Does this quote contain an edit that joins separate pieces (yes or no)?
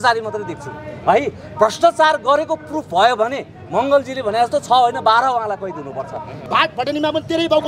yes